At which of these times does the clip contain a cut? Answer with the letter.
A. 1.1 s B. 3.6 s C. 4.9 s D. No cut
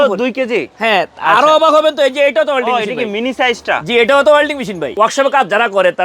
C